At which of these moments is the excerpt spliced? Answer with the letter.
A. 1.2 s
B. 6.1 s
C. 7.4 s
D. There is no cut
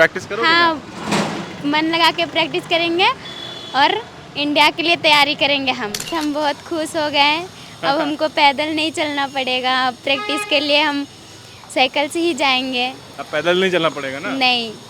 B